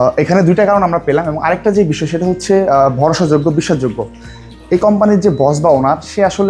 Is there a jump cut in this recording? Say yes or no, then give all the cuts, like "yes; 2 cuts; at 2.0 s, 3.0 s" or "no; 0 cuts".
no; 0 cuts